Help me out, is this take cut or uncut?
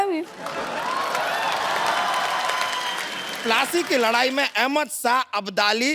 cut